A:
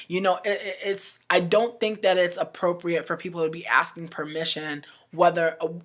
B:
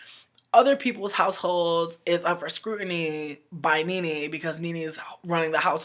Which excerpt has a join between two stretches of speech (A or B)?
A